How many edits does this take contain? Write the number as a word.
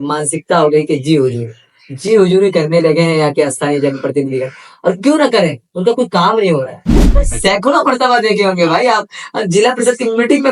one